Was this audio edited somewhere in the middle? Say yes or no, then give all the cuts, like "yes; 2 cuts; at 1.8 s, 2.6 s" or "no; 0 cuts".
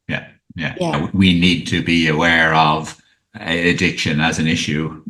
yes; 1 cut; at 0.9 s